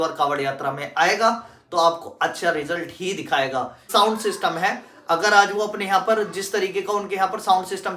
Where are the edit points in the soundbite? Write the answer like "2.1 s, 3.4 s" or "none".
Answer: 3.9 s